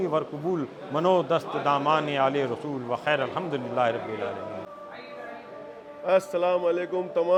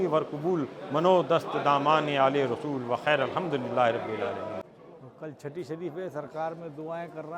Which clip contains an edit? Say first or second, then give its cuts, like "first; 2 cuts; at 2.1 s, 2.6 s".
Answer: second; 1 cut; at 4.7 s